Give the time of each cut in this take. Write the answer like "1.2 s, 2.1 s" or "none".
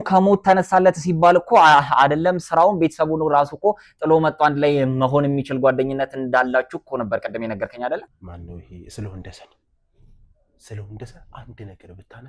8.1 s